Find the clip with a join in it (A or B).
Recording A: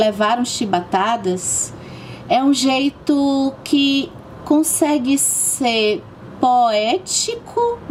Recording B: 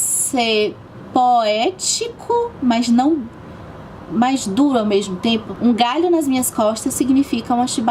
B